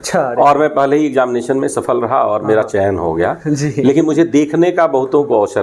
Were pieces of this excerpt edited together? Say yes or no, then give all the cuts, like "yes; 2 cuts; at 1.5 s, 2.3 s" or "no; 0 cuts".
no; 0 cuts